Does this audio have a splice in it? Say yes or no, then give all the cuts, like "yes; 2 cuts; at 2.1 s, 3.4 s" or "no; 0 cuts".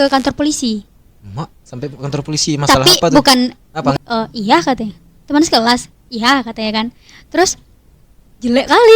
yes; 1 cut; at 3.9 s